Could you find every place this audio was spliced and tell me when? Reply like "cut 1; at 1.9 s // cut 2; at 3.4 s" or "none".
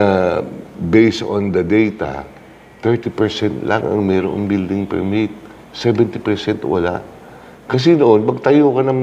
none